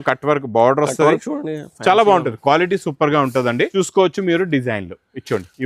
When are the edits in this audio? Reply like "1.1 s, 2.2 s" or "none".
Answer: 3.7 s